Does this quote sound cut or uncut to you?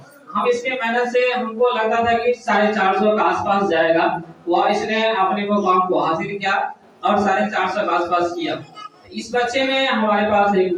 uncut